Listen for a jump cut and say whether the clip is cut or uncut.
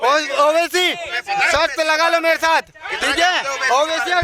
uncut